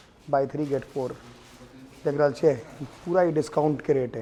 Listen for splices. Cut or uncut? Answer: uncut